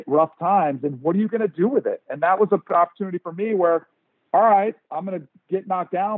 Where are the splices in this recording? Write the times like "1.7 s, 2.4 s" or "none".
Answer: 2.6 s